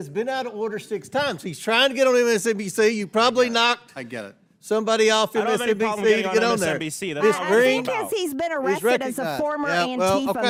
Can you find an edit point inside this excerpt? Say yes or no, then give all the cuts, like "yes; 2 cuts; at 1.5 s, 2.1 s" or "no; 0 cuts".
no; 0 cuts